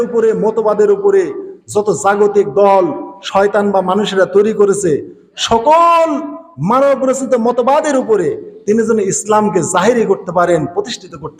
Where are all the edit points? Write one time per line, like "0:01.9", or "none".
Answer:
none